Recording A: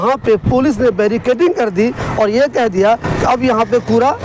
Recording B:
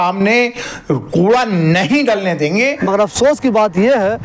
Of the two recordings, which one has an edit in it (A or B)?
B